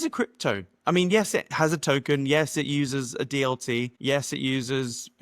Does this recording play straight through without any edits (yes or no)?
no